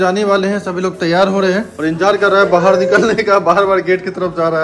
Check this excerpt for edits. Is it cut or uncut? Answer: uncut